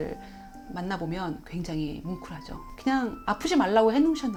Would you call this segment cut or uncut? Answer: uncut